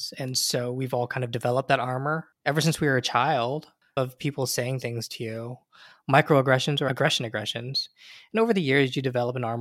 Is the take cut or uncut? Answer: cut